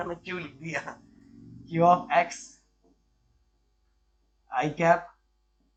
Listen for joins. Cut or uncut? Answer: uncut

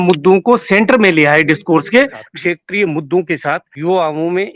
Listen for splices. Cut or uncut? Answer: cut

